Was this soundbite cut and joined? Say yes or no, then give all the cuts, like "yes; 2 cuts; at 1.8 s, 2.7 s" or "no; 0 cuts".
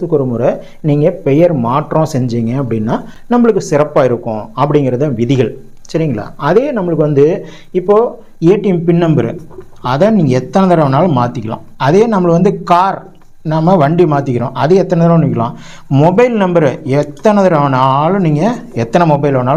no; 0 cuts